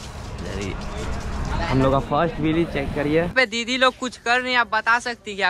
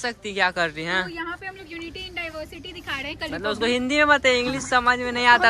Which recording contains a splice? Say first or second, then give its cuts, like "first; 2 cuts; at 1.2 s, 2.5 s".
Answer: first; 1 cut; at 3.3 s